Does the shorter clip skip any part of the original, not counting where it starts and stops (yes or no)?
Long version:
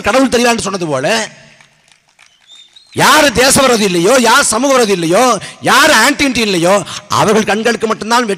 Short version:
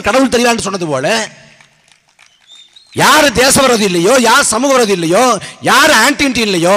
no